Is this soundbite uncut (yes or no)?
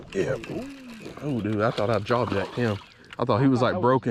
yes